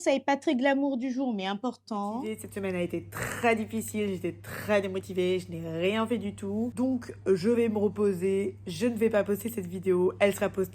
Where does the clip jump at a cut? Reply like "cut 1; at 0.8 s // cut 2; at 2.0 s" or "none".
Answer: cut 1; at 2.4 s // cut 2; at 6.7 s

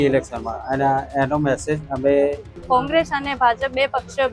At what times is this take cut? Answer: cut 1; at 2.5 s

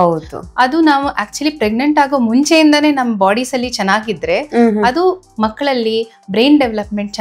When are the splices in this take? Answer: none

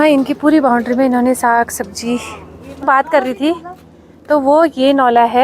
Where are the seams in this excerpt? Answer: cut 1; at 2.8 s

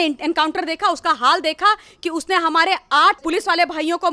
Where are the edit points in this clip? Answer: cut 1; at 3.2 s

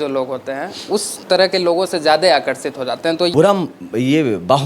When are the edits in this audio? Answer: cut 1; at 3.3 s

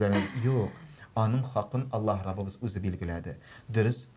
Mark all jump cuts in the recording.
none

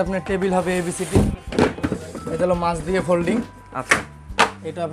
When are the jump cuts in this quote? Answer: cut 1; at 1.3 s

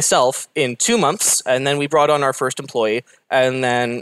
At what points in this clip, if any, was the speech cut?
none

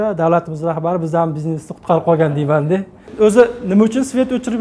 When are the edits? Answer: cut 1; at 3.0 s

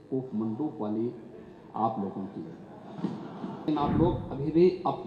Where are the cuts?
cut 1; at 3.7 s

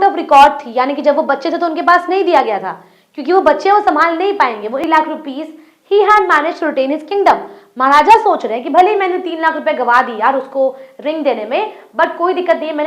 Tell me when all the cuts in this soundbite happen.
cut 1; at 4.8 s

